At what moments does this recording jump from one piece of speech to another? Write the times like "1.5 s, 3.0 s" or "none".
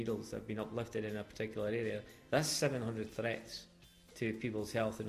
none